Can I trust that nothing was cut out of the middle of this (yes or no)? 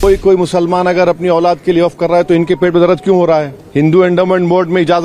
no